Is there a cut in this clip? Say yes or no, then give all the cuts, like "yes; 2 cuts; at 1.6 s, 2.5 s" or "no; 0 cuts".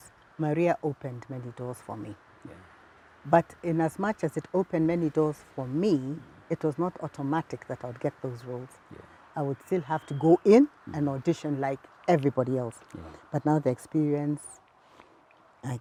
no; 0 cuts